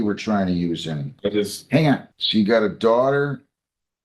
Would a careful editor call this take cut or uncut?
cut